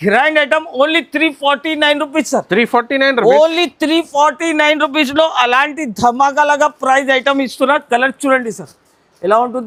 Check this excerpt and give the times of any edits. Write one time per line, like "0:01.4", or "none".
none